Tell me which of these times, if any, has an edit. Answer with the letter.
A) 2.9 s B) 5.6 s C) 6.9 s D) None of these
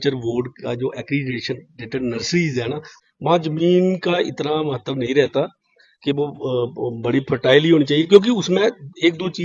A